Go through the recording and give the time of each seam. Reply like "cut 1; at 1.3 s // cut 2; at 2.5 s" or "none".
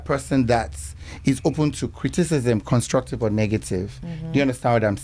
none